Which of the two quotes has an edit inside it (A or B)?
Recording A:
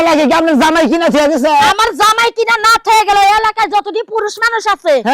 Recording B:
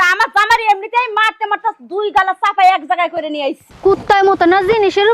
B